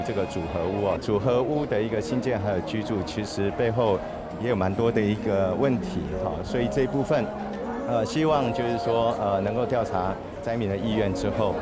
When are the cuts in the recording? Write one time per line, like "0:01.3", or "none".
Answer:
0:01.0